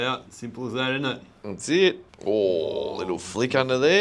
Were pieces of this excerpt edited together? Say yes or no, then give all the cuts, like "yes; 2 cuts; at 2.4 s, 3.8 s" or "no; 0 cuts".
yes; 1 cut; at 2.1 s